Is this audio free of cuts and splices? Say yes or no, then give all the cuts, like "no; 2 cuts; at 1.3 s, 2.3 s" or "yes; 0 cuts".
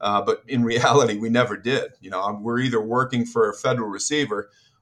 yes; 0 cuts